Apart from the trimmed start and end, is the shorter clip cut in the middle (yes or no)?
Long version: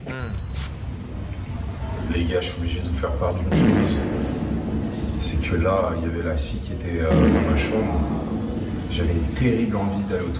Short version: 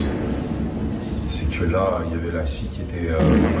no